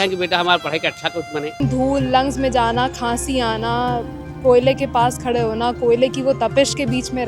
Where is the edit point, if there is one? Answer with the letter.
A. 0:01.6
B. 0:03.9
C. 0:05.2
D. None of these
A